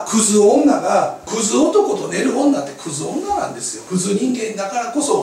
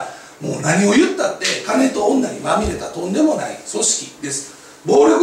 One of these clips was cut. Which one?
first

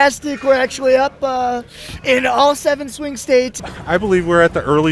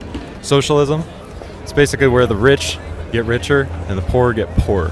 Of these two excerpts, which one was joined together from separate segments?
first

